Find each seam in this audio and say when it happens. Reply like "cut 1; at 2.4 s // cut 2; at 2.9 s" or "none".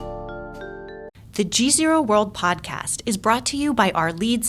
cut 1; at 1.0 s